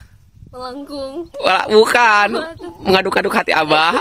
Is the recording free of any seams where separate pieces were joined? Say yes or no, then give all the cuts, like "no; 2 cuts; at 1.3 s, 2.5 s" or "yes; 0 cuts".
yes; 0 cuts